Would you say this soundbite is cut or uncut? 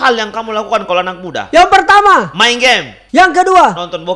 cut